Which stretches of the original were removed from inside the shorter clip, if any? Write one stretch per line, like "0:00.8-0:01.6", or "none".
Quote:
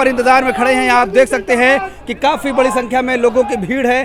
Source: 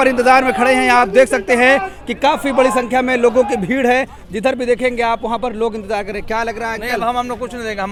none